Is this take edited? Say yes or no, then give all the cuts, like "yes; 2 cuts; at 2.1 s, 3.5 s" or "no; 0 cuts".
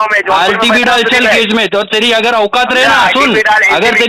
no; 0 cuts